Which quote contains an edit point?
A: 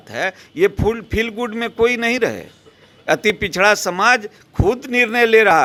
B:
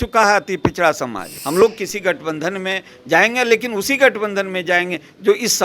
B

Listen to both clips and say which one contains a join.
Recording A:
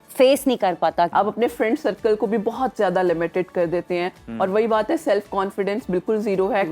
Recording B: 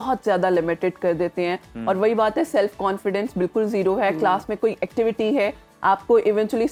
A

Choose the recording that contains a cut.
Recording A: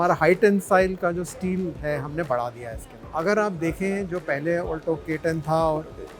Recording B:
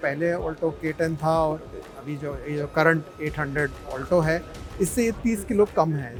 A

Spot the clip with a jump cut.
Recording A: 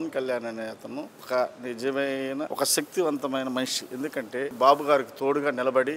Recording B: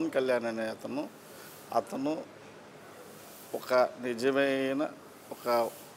A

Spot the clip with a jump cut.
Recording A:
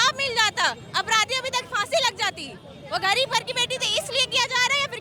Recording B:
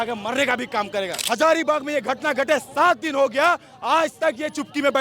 B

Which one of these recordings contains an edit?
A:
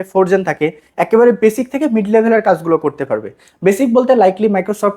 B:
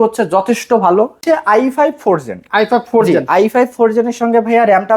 B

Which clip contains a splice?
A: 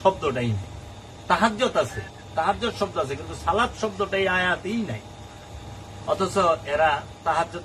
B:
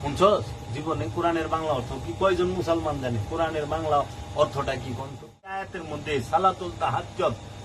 B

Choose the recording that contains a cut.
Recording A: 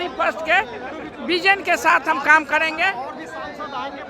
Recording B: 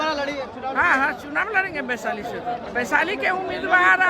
B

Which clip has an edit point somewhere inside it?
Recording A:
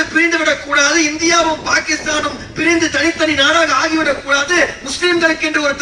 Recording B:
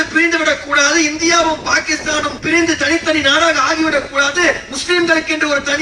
B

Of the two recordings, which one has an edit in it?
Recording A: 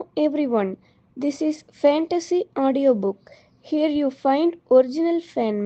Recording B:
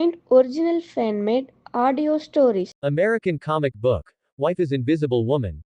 B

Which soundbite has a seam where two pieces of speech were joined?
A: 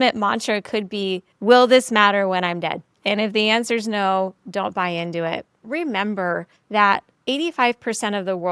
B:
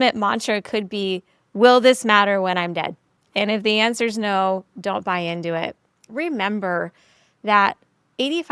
A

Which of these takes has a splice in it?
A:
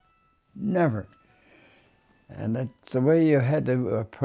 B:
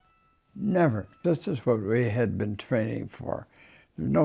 B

